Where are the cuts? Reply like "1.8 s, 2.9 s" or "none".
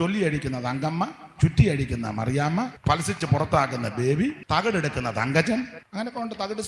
2.8 s, 4.4 s, 5.8 s